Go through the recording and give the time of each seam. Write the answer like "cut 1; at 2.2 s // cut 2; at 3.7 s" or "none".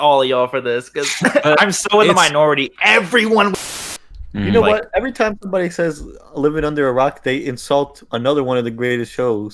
cut 1; at 3.5 s